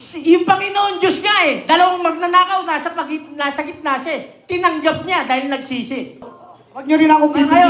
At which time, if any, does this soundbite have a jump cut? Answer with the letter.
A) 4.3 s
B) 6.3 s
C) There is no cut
B